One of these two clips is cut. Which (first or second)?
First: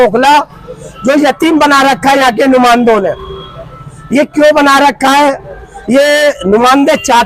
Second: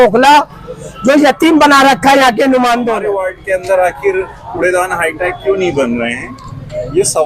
second